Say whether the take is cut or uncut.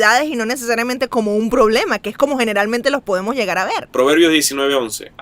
cut